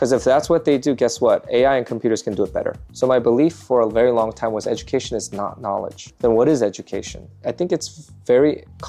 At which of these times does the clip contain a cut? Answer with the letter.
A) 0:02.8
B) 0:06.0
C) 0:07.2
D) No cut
C